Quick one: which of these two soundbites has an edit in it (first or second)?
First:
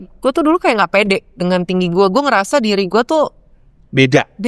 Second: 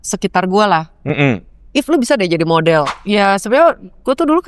second